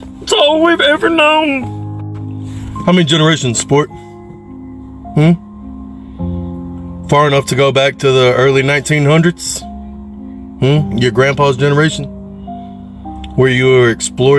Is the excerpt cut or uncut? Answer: uncut